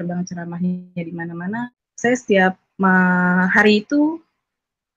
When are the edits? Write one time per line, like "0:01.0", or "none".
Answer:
0:01.6